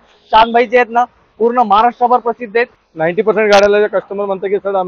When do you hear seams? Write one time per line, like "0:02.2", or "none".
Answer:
0:02.8